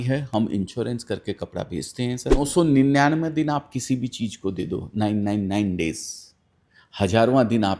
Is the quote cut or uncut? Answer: cut